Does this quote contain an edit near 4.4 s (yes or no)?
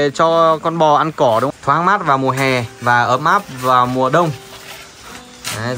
no